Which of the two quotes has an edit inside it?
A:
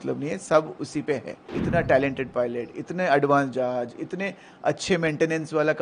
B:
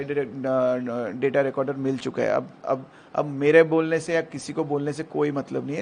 A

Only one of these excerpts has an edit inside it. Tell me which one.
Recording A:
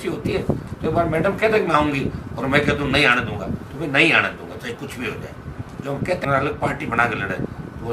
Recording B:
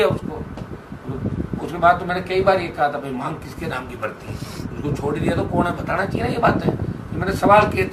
A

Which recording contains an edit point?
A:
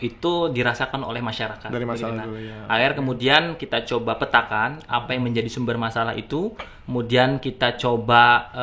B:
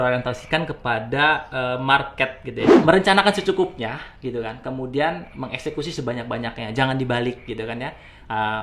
B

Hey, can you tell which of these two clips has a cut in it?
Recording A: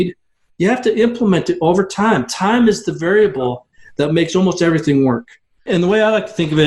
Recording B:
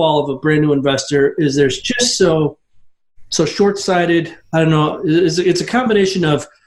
A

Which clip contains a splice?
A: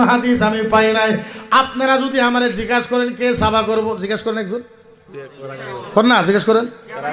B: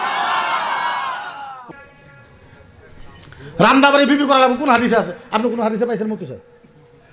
B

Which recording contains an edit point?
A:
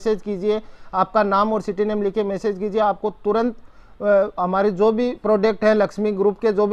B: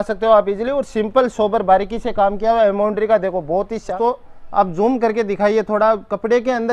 B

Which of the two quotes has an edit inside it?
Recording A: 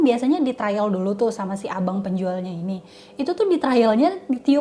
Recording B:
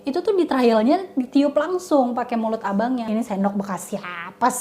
B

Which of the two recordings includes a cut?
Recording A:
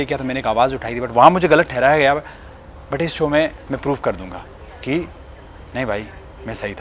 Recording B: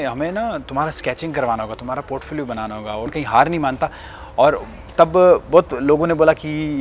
B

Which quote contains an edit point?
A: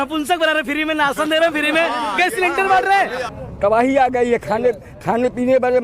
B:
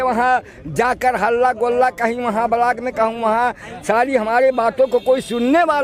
A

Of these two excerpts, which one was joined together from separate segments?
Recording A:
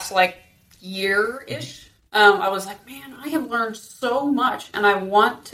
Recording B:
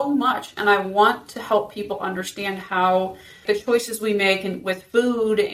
B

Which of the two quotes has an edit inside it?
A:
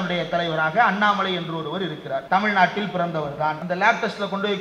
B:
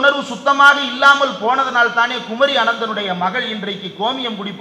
A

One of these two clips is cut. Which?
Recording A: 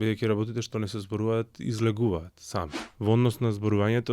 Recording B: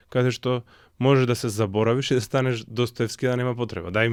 A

